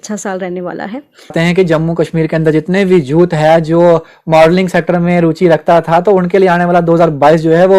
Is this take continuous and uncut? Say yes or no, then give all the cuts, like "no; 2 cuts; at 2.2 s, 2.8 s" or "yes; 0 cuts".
no; 1 cut; at 1.3 s